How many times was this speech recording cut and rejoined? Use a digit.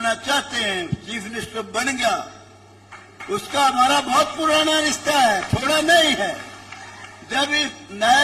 0